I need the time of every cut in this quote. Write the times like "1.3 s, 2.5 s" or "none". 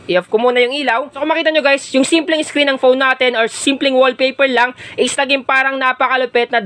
1.2 s